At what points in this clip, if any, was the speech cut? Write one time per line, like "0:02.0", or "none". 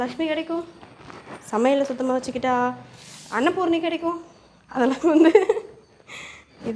none